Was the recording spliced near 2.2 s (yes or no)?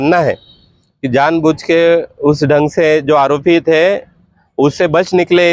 no